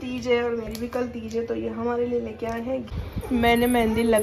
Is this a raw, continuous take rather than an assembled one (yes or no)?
no